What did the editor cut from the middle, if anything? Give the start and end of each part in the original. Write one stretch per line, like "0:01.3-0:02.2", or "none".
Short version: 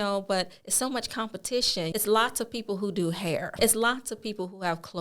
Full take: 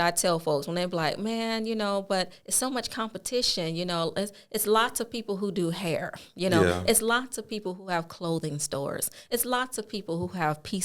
0:03.7-0:04.5
0:06.1-0:06.8